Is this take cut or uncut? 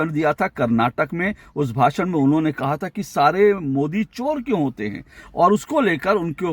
uncut